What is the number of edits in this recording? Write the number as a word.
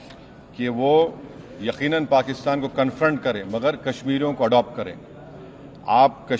zero